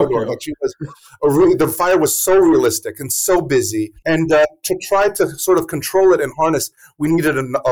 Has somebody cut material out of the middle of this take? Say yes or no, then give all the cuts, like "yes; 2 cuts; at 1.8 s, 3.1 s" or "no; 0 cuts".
no; 0 cuts